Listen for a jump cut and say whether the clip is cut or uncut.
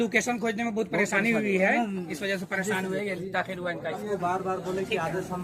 cut